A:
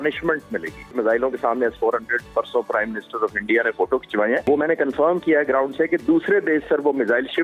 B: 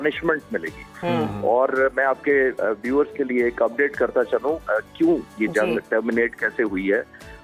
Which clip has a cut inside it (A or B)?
A